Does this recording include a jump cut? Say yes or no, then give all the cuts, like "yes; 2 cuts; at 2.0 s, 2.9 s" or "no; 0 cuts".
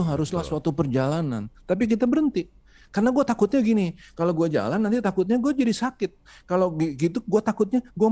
no; 0 cuts